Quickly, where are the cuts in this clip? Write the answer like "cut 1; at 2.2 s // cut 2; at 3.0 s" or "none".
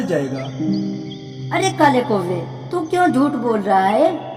none